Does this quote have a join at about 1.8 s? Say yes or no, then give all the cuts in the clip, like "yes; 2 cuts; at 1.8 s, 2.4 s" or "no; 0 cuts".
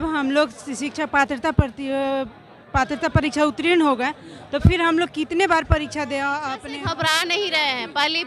no; 1 cut; at 6.6 s